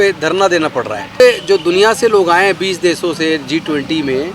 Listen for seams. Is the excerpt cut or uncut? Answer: cut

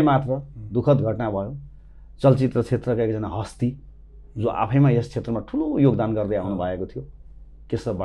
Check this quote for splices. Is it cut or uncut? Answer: uncut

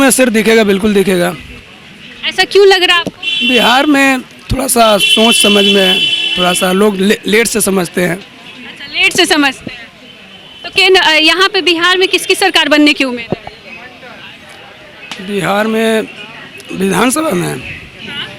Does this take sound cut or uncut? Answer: uncut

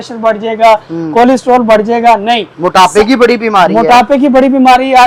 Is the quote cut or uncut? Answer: uncut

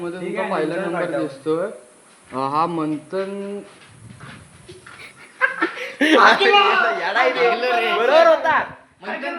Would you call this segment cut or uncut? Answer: uncut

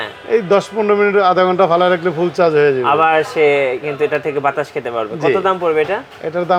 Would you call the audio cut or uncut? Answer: uncut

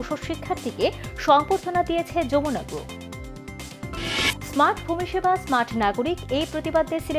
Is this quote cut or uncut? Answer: uncut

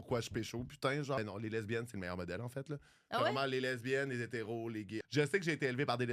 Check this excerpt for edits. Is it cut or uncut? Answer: cut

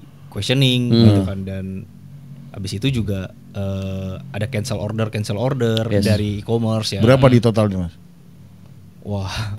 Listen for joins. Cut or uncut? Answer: uncut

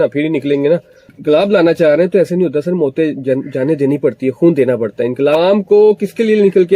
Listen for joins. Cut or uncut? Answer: cut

